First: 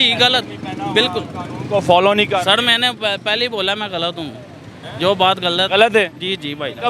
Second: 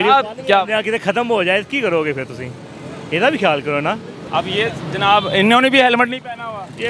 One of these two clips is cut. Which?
second; 1 cut; at 4.1 s

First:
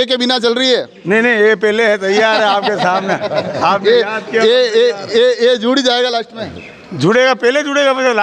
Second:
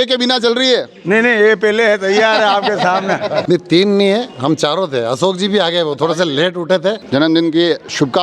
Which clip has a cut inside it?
second; 2 cuts; at 3.4 s, 7.0 s

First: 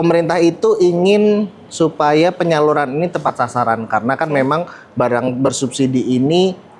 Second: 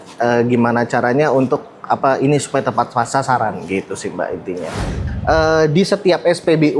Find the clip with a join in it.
second; 1 cut; at 5.0 s

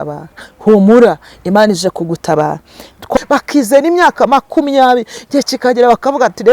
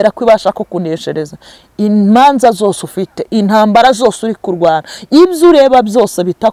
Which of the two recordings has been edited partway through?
first; 1 cut; at 3.2 s

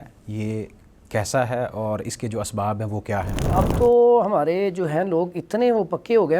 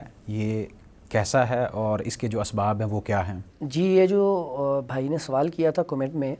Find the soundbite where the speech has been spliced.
first; 1 cut; at 3.5 s

